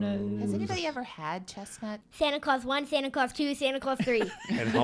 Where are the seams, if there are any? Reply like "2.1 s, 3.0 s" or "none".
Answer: 2.1 s